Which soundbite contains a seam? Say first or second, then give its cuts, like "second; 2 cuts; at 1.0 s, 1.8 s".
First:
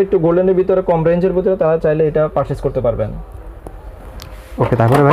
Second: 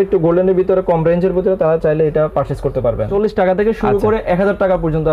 second; 1 cut; at 3.1 s